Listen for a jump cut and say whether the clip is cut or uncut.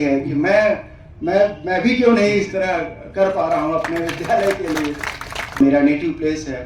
cut